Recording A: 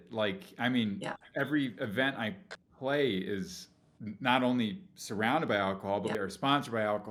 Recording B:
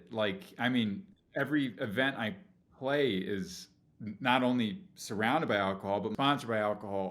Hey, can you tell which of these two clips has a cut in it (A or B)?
B